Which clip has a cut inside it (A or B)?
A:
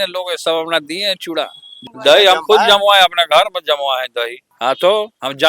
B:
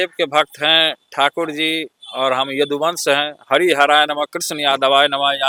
A